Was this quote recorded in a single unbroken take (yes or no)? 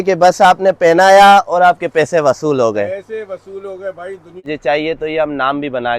no